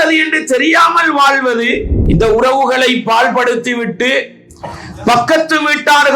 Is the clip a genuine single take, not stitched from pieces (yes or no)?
no